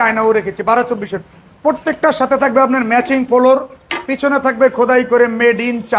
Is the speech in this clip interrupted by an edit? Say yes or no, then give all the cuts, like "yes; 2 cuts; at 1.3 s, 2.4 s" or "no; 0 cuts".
no; 0 cuts